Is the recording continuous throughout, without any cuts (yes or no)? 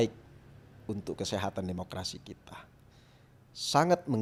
yes